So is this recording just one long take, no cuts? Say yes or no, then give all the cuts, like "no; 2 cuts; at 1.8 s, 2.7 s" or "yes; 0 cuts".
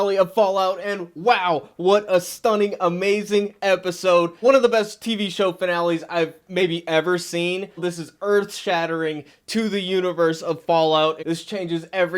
no; 3 cuts; at 4.3 s, 7.8 s, 11.2 s